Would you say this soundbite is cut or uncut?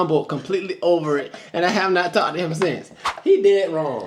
uncut